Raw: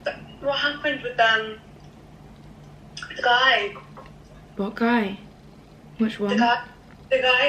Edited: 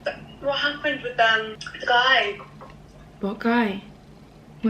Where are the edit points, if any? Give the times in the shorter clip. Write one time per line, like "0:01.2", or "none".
0:01.6